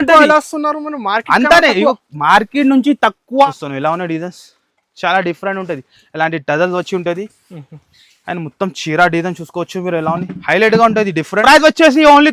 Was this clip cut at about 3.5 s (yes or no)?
yes